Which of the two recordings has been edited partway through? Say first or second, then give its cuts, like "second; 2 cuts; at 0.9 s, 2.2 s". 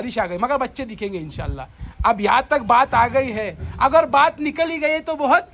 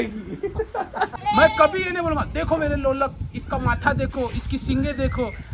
second; 1 cut; at 1.2 s